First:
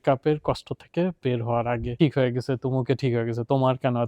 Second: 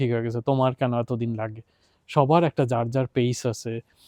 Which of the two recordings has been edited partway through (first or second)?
first